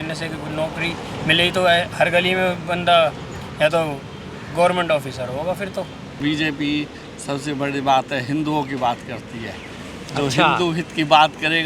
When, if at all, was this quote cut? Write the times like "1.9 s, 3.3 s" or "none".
6.2 s